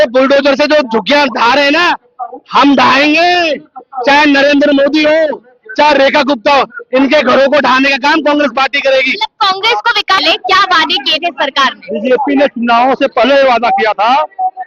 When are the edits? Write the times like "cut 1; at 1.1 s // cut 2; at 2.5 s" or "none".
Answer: cut 1; at 10.2 s